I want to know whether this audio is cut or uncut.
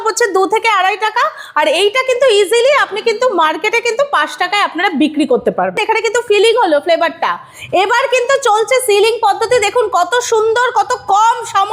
cut